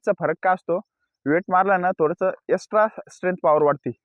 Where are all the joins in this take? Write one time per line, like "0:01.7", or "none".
none